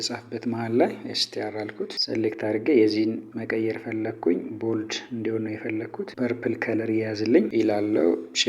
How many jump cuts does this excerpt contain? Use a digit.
3